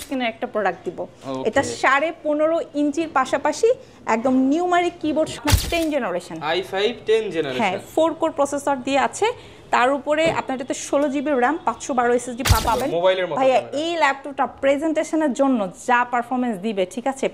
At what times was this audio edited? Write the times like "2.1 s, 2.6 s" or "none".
5.4 s, 12.6 s